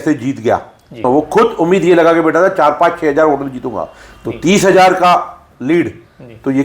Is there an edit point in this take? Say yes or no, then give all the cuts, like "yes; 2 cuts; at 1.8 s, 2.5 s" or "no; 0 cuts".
yes; 1 cut; at 1.0 s